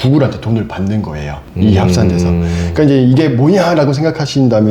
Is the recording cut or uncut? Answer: uncut